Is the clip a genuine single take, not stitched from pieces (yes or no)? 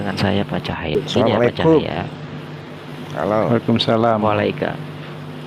no